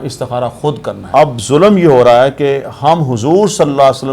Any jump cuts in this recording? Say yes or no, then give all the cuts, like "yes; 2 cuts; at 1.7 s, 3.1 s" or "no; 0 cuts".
yes; 1 cut; at 0.9 s